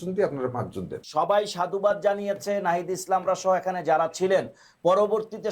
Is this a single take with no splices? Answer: no; 1 cut; at 1.0 s

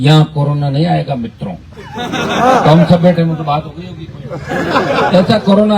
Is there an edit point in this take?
no; 0 cuts

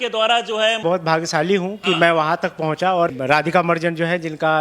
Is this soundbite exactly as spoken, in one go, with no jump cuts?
no; 2 cuts; at 0.8 s, 3.2 s

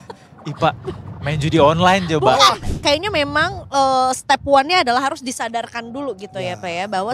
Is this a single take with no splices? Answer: no; 1 cut; at 2.6 s

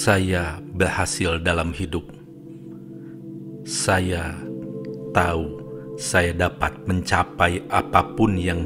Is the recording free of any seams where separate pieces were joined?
yes; 0 cuts

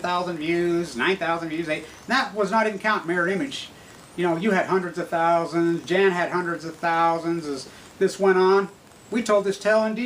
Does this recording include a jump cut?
yes; 1 cut; at 8.1 s

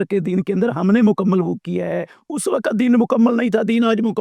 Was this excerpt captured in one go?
yes; 0 cuts

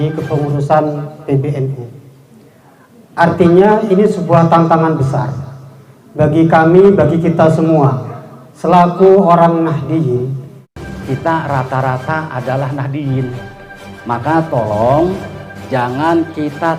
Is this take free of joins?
no; 1 cut; at 10.8 s

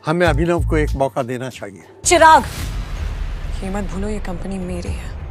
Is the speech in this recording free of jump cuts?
no; 1 cut; at 1.9 s

